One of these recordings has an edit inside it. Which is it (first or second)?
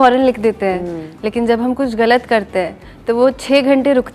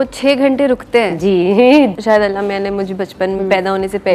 second